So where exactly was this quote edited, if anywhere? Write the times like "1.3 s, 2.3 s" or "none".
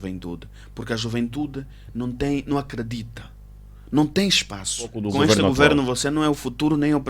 5.0 s

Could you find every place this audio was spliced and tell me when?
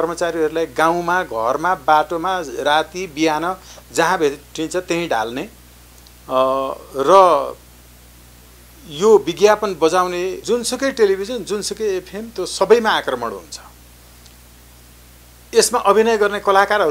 10.4 s

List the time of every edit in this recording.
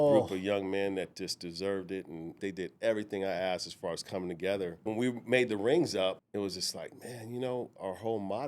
2.4 s, 4.9 s, 6.2 s

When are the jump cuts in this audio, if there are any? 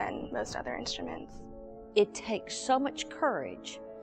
1.3 s

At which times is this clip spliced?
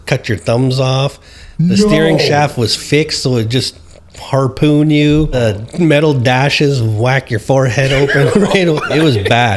5.3 s

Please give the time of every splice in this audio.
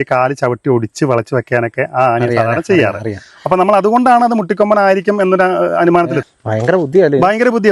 6.2 s

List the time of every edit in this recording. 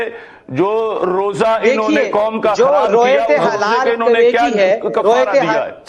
none

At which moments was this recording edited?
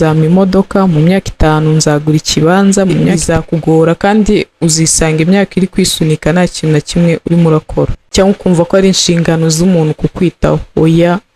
3.2 s, 8.0 s

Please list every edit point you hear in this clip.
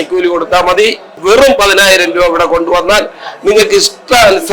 1.2 s

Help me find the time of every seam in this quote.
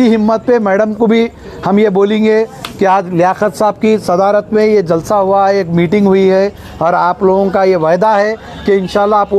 none

